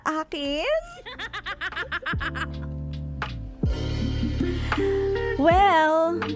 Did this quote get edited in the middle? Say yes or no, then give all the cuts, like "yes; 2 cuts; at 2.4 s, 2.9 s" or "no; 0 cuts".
no; 0 cuts